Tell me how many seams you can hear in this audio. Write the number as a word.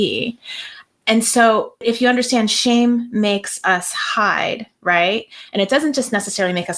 one